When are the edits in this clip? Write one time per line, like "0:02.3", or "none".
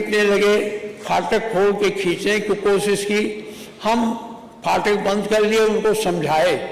none